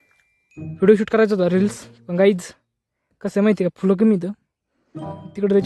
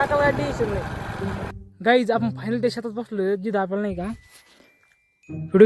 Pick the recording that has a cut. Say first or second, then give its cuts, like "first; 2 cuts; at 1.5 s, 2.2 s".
second; 1 cut; at 1.6 s